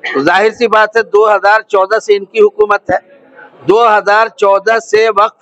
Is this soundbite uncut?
yes; 0 cuts

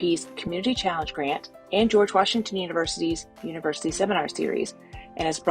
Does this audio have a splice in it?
no; 0 cuts

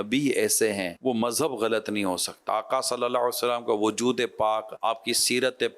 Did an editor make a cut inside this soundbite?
yes; 3 cuts; at 0.9 s, 2.4 s, 4.7 s

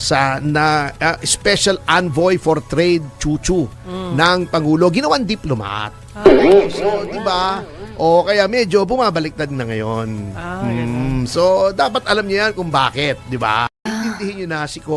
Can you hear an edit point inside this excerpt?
yes; 1 cut; at 13.9 s

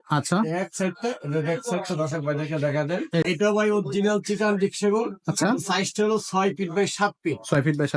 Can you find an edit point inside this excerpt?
yes; 1 cut; at 3.3 s

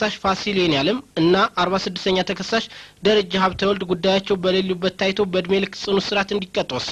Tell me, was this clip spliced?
no; 0 cuts

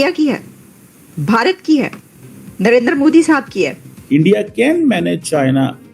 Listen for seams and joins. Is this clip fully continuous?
no; 1 cut; at 4.2 s

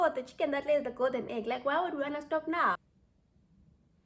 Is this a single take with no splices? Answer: no; 1 cut; at 2.8 s

